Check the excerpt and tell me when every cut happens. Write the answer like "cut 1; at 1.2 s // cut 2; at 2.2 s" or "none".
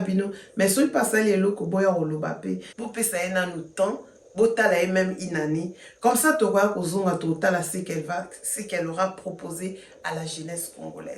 cut 1; at 2.6 s